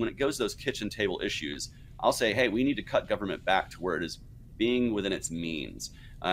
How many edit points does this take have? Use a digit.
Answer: 1